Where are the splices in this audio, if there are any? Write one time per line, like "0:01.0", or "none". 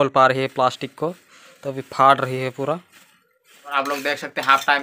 0:03.7